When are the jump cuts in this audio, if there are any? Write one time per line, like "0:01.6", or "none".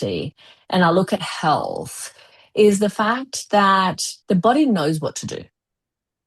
0:04.1

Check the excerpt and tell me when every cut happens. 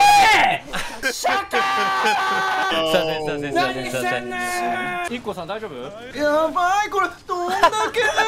0:01.0
0:02.7
0:05.0
0:06.0

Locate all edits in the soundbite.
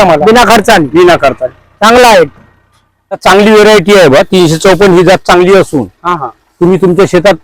0:03.2

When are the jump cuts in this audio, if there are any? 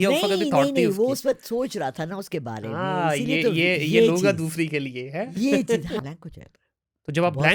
0:06.0

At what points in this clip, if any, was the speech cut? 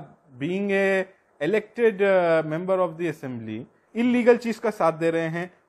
0:03.8

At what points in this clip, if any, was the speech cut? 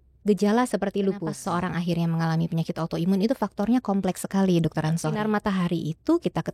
0:01.4
0:05.2

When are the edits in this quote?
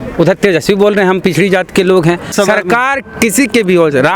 0:02.3

